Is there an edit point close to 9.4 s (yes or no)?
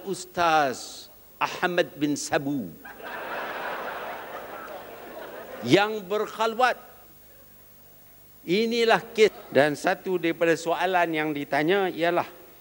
yes